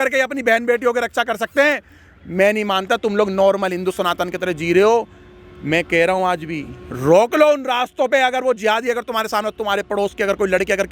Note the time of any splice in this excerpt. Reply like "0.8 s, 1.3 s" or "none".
none